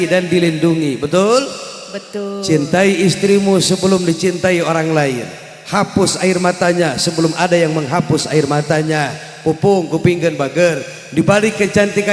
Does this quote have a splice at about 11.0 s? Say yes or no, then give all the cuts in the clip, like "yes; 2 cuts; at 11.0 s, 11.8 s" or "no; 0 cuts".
no; 0 cuts